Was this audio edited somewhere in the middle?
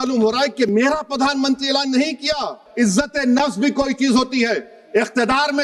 yes; 1 cut; at 2.6 s

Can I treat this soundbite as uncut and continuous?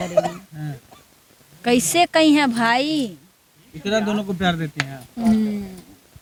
yes; 0 cuts

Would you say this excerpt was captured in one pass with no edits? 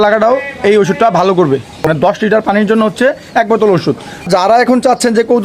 no; 2 cuts; at 1.9 s, 4.3 s

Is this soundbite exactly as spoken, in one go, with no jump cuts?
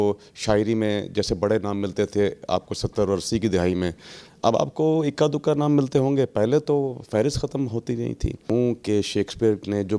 no; 1 cut; at 8.4 s

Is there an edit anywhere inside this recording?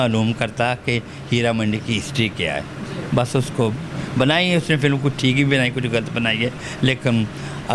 no; 0 cuts

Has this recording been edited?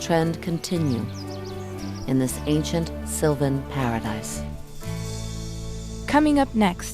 yes; 1 cut; at 6.0 s

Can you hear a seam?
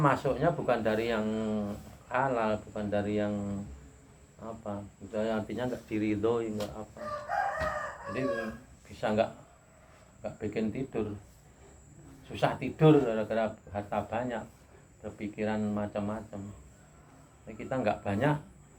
no; 0 cuts

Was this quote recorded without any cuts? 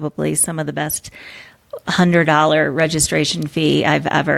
yes; 0 cuts

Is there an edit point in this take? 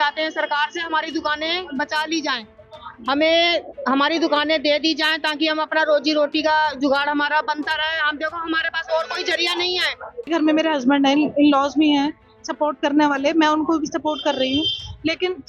yes; 1 cut; at 10.3 s

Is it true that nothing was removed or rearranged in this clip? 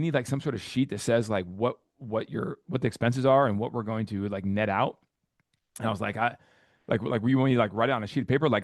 yes; 0 cuts

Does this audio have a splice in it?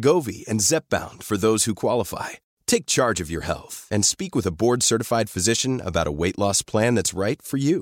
no; 0 cuts

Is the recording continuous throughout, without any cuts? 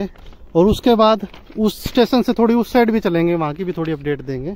yes; 0 cuts

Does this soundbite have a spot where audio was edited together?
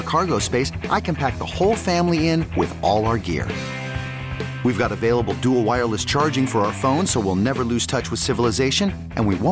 no; 0 cuts

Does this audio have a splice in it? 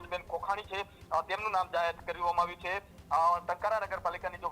no; 0 cuts

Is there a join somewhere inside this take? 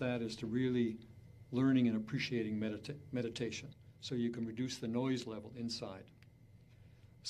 yes; 1 cut; at 4.5 s

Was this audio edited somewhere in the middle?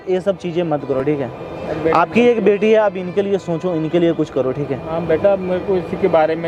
no; 0 cuts

